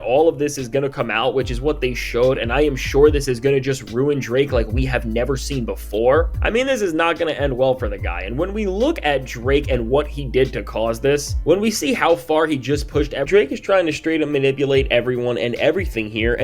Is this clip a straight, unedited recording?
no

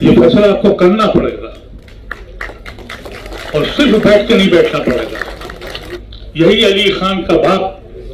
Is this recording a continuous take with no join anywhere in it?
no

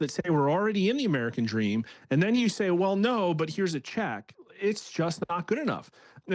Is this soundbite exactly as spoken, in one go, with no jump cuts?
yes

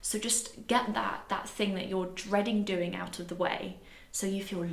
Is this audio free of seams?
yes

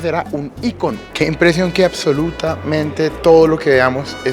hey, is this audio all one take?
no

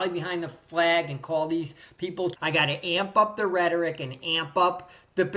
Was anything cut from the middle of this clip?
yes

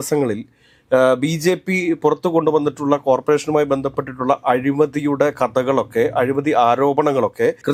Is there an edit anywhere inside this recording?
no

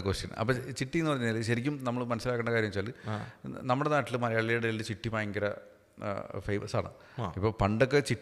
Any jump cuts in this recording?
no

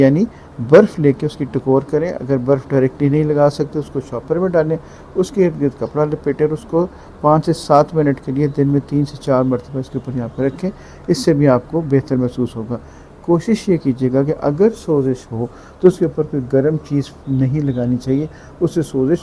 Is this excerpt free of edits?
yes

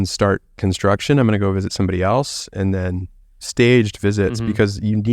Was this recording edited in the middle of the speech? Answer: yes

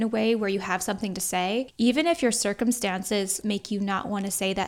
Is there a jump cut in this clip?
yes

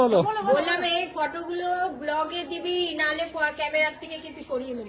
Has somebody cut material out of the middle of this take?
no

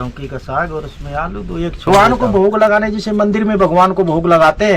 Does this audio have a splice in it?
yes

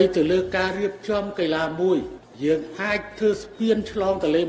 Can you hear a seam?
yes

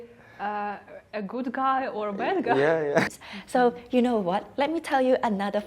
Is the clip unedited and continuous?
no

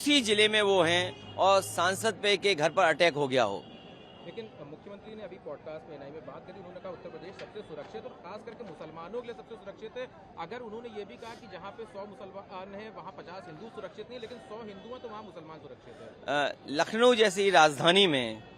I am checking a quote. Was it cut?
no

